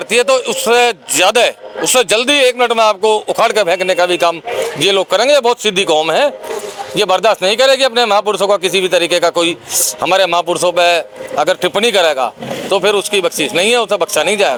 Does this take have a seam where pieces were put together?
no; 0 cuts

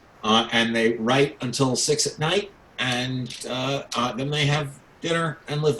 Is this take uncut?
yes; 0 cuts

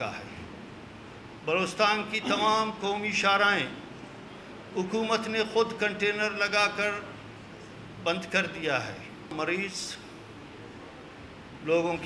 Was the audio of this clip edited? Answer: yes; 1 cut; at 9.3 s

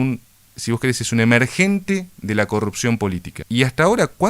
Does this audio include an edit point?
yes; 1 cut; at 3.3 s

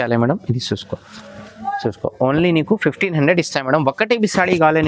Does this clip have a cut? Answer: no; 0 cuts

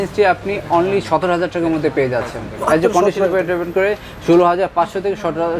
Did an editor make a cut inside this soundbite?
no; 0 cuts

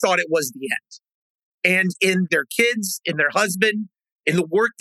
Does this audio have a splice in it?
yes; 1 cut; at 2.3 s

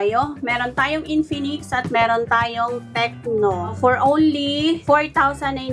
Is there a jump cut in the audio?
yes; 2 cuts; at 3.7 s, 4.8 s

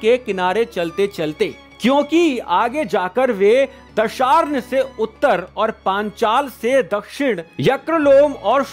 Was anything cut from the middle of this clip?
no; 0 cuts

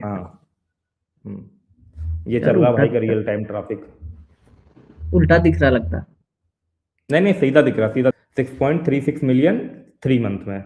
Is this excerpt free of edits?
no; 1 cut; at 8.1 s

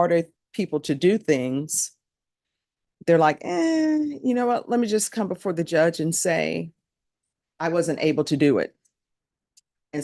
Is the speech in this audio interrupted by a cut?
no; 0 cuts

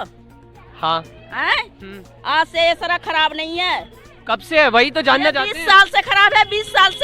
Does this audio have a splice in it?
no; 0 cuts

